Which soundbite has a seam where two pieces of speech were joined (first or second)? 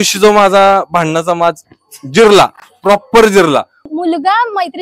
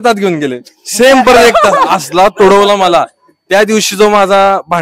first